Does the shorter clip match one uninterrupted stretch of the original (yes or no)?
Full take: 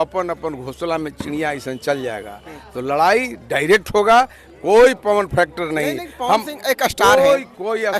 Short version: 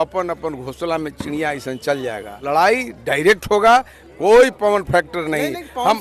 no